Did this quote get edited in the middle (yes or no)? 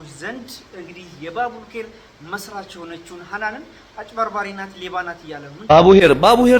yes